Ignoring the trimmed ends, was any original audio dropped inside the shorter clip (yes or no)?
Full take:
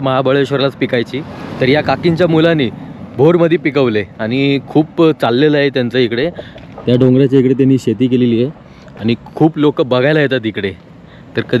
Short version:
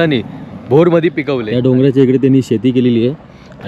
yes